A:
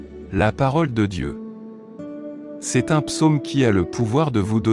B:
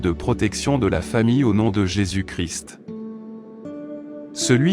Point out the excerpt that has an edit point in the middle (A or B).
B